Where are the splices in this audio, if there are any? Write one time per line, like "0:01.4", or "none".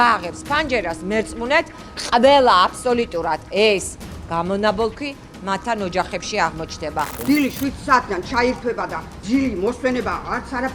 0:07.1
0:09.1